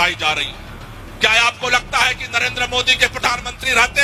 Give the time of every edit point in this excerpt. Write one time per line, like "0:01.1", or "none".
none